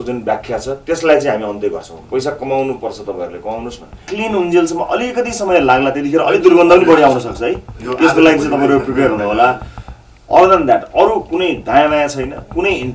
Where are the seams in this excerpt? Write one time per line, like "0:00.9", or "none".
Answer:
0:04.0